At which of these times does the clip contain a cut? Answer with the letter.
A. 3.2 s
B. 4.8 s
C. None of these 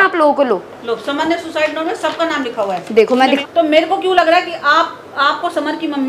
A